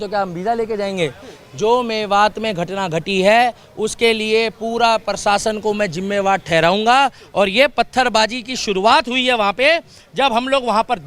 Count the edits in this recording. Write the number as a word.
zero